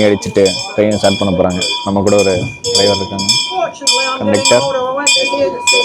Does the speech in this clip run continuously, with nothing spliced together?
yes; 0 cuts

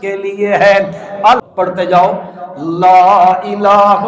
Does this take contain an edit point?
yes; 1 cut; at 1.4 s

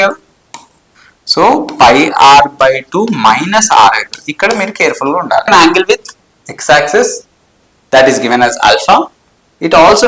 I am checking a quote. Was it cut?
yes; 1 cut; at 5.5 s

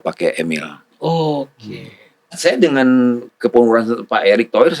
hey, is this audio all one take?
no; 1 cut; at 2.3 s

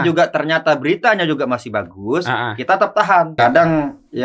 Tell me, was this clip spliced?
yes; 1 cut; at 3.3 s

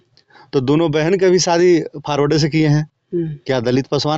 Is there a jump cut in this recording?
no; 0 cuts

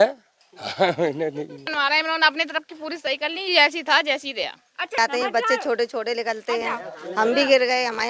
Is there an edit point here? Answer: yes; 2 cuts; at 1.7 s, 5.0 s

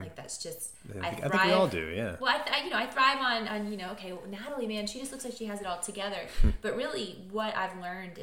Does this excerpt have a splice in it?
no; 0 cuts

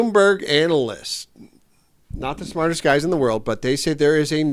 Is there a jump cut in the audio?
no; 0 cuts

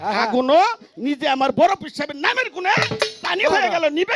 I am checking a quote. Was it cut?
no; 0 cuts

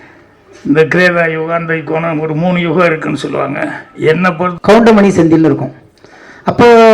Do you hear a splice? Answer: yes; 1 cut; at 4.5 s

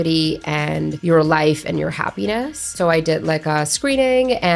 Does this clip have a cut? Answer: yes; 2 cuts; at 1.0 s, 2.7 s

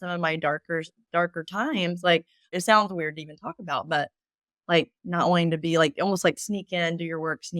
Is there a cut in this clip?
yes; 1 cut; at 2.5 s

